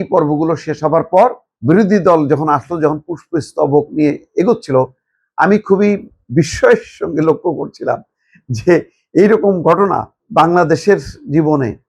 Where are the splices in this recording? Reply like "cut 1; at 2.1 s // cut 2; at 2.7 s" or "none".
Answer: cut 1; at 1.5 s // cut 2; at 10.2 s